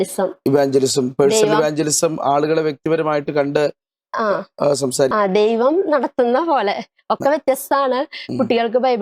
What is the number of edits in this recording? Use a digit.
1